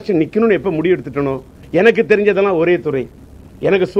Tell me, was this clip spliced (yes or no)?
yes